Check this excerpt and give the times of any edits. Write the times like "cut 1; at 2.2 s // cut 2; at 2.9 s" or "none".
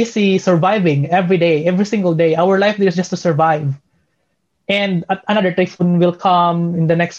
none